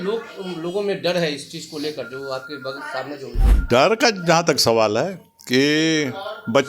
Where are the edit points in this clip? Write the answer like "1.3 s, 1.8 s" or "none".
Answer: 3.6 s